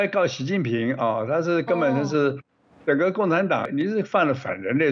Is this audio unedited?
no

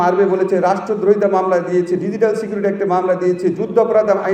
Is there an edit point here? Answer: no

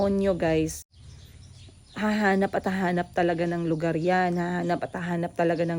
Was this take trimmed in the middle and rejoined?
yes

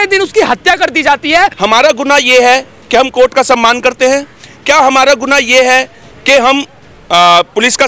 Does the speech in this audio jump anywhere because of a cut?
yes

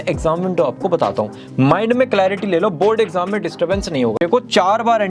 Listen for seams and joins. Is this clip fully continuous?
no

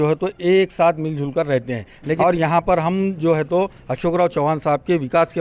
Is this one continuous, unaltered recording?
no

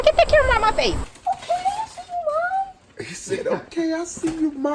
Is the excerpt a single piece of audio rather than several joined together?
no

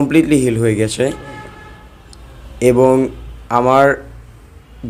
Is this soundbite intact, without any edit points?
yes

